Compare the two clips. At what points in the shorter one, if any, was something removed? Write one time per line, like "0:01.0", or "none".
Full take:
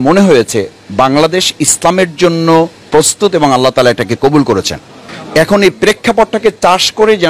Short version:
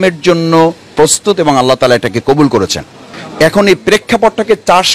none